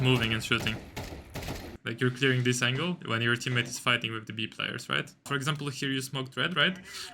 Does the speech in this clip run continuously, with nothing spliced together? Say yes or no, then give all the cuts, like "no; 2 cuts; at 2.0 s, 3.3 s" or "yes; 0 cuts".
no; 2 cuts; at 1.8 s, 5.3 s